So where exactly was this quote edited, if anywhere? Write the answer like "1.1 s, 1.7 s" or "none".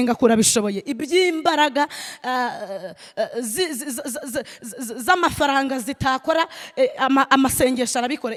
none